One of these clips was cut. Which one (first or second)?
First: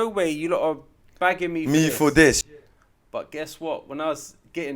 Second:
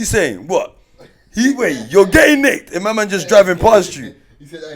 first